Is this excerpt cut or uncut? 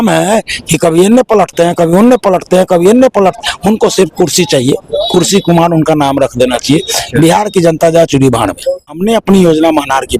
cut